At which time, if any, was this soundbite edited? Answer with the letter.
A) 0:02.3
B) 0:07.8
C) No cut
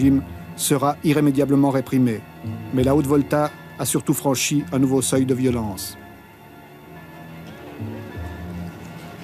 B